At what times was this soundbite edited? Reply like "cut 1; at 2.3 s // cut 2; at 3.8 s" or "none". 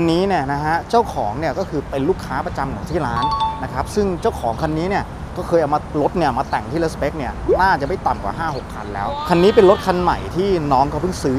none